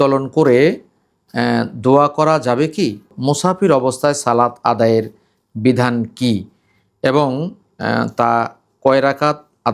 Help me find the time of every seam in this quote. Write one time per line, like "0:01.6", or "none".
0:03.1